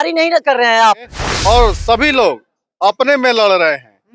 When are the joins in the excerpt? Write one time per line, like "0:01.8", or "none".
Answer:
0:01.2